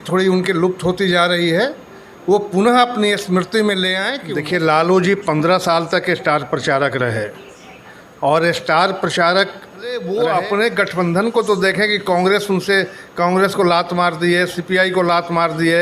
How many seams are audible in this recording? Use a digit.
2